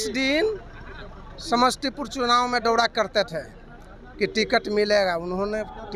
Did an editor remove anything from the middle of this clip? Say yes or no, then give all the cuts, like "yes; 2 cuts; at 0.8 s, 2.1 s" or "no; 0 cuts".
no; 0 cuts